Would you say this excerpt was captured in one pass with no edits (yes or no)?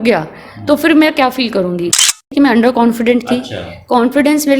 no